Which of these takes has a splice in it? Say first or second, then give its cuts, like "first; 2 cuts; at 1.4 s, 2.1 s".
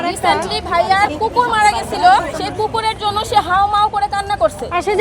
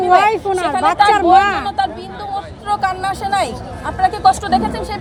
first; 1 cut; at 2.4 s